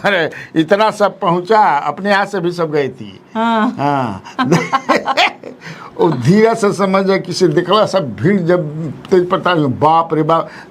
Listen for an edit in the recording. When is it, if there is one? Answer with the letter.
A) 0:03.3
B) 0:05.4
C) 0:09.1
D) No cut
D